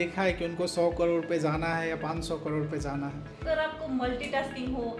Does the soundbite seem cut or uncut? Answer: cut